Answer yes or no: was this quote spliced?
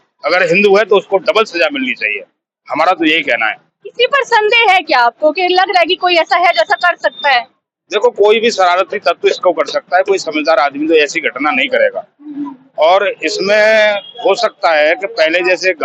no